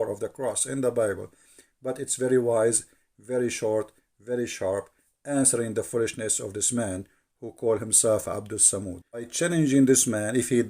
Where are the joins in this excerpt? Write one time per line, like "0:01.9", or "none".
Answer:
0:09.3

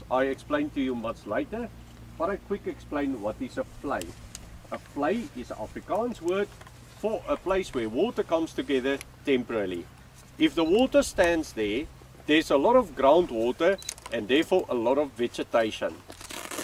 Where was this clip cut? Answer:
none

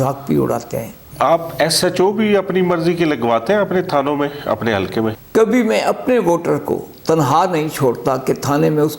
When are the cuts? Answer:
0:01.0
0:05.2

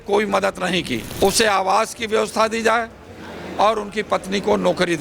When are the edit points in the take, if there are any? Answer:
0:01.1

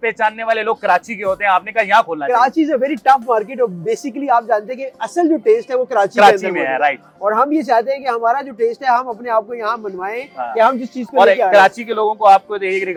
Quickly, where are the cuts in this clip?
none

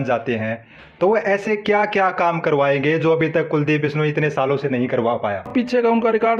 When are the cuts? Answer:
0:05.5

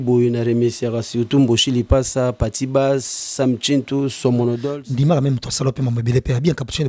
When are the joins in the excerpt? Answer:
0:04.7

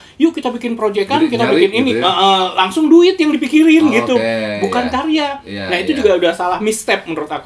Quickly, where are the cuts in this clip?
none

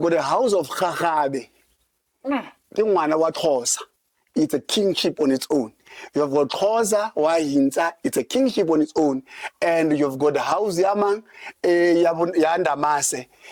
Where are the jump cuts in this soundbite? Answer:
none

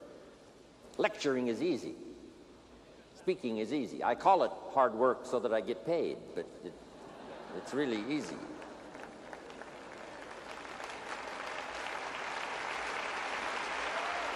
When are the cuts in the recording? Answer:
0:01.4

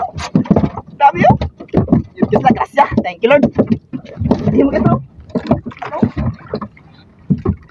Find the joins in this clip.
0:05.2

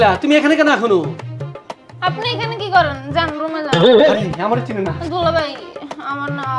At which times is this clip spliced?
none

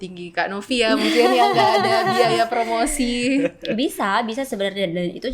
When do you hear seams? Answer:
none

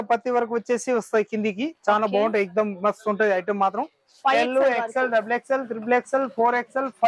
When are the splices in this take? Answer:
0:04.1

